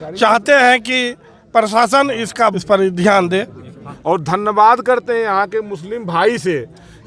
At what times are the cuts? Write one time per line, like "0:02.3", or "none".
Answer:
0:02.6
0:03.9